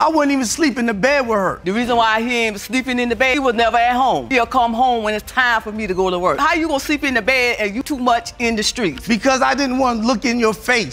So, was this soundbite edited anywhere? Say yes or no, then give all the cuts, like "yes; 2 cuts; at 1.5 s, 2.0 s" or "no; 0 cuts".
no; 0 cuts